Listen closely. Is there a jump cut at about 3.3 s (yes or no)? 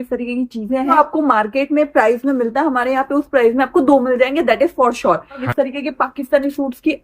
no